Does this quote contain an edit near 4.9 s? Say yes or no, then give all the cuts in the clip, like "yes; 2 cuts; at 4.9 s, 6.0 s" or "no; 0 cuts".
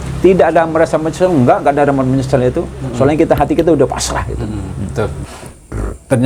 yes; 1 cut; at 4.9 s